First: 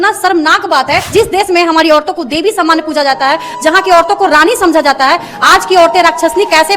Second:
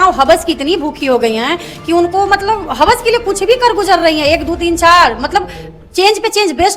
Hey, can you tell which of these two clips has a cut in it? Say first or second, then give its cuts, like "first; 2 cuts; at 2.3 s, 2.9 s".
first; 1 cut; at 1.1 s